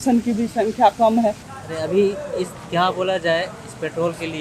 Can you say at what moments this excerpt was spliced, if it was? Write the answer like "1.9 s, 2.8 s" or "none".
1.5 s